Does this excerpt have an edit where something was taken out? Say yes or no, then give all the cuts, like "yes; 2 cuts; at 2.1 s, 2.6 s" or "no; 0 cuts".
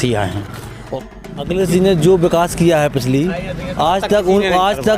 yes; 1 cut; at 1.2 s